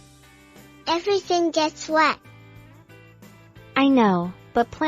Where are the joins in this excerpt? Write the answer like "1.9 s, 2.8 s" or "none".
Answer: 2.2 s, 3.7 s